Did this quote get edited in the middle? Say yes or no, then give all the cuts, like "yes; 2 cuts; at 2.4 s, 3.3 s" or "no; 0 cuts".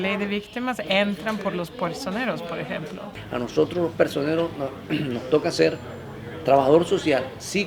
yes; 1 cut; at 3.2 s